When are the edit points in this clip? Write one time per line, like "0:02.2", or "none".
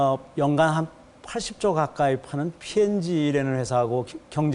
0:01.2